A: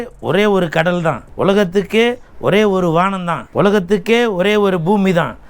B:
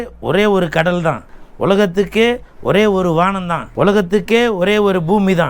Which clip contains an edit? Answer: A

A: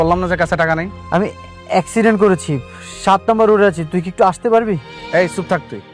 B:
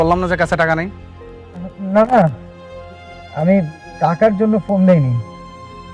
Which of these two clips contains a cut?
A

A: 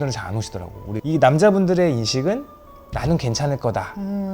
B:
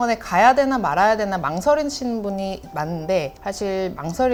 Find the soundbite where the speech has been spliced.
A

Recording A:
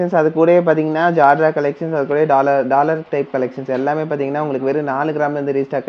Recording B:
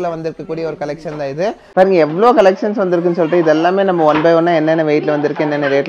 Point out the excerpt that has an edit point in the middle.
B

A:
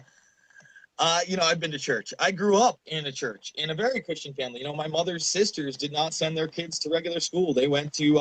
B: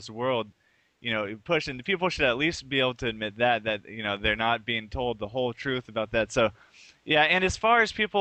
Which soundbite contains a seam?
A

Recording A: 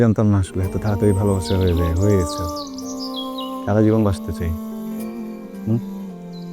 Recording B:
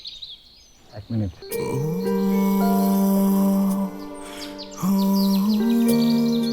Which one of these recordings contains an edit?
B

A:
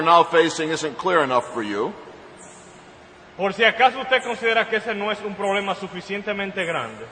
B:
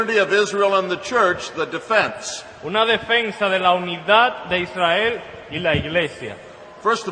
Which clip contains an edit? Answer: A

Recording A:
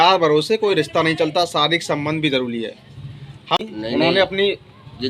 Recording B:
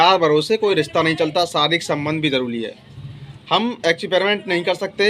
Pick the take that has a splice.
A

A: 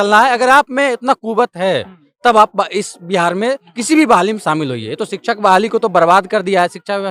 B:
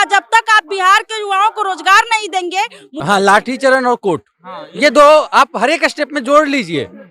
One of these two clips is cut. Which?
B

